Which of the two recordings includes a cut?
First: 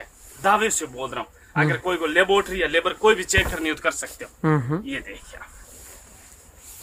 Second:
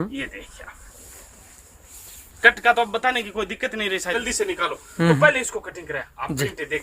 second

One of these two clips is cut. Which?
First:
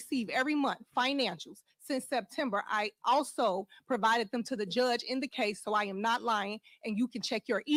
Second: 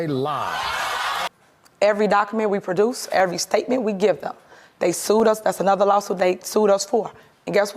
second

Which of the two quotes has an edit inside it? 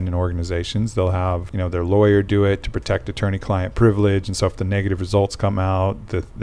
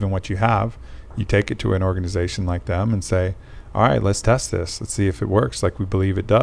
first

